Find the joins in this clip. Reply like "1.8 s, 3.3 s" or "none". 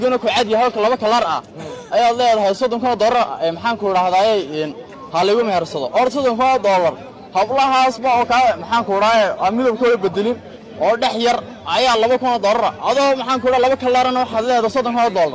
none